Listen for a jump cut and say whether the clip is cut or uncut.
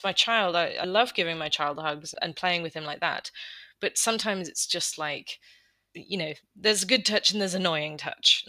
cut